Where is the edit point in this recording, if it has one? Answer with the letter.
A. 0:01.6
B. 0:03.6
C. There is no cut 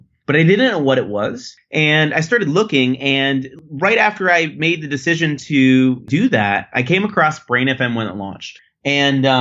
B